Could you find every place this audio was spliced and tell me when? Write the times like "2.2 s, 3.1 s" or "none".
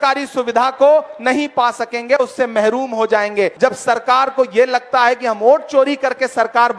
3.5 s